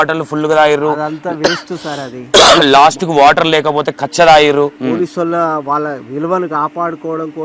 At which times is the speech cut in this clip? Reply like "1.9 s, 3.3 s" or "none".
4.8 s